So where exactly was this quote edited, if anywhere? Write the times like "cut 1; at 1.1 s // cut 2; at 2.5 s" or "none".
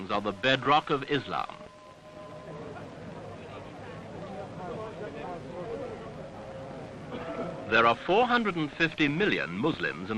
cut 1; at 7.6 s